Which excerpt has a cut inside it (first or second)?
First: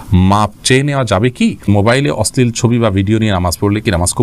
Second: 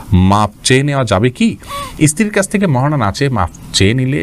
first